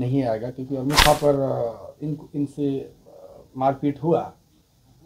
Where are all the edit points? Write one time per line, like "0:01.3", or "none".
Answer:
0:01.0

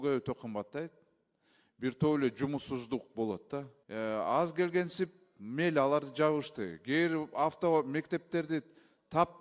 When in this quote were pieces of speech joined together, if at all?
0:03.8

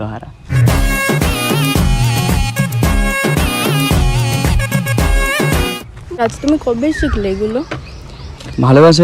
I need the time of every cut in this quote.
0:06.2

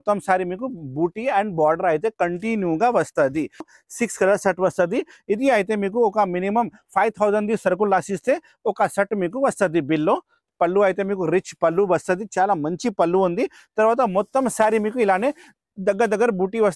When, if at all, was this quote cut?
0:03.7
0:10.5

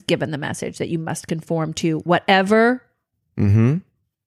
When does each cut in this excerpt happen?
none

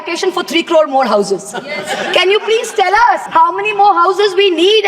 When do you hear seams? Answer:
0:03.2

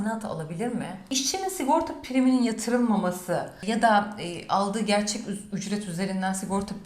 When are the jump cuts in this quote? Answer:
0:01.1

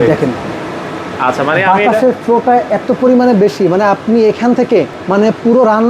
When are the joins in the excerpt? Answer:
0:05.0

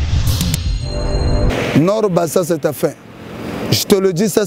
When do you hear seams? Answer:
0:01.5

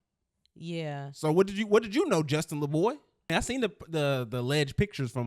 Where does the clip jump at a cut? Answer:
0:03.3

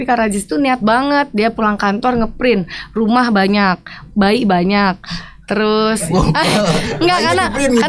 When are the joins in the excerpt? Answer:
none

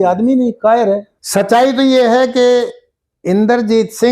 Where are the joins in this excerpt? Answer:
0:01.2

